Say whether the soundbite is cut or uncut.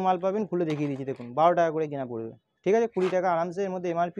uncut